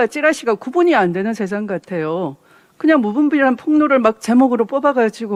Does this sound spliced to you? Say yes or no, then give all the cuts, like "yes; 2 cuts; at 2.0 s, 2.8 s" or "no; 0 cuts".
no; 0 cuts